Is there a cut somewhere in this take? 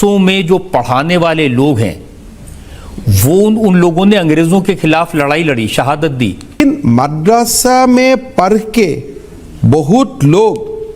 yes; 1 cut; at 6.5 s

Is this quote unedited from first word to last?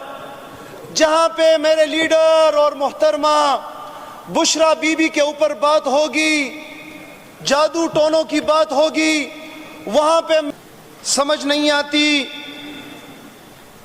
no; 1 cut; at 10.5 s

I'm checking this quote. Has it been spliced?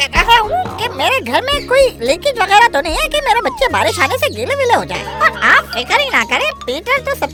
no; 0 cuts

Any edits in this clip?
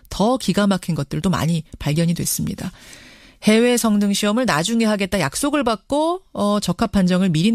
yes; 1 cut; at 6.3 s

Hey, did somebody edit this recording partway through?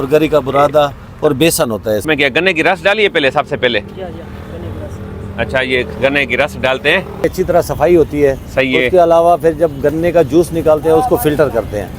yes; 2 cuts; at 2.0 s, 7.2 s

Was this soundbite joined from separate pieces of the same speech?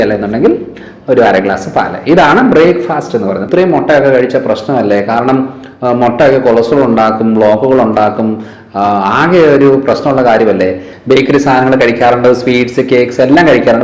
yes; 2 cuts; at 3.4 s, 10.9 s

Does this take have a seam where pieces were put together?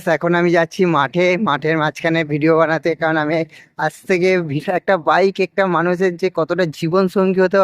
yes; 1 cut; at 4.5 s

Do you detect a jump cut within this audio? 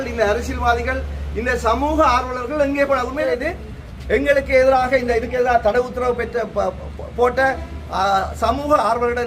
yes; 1 cut; at 3.3 s

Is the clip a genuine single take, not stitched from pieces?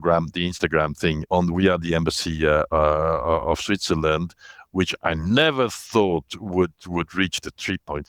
no; 1 cut; at 1.2 s

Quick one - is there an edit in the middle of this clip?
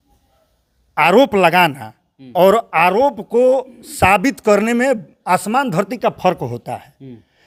no; 0 cuts

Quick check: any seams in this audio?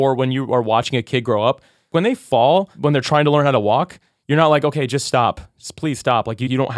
yes; 2 cuts; at 1.9 s, 2.7 s

